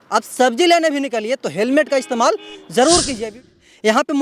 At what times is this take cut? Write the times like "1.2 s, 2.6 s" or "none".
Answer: 3.3 s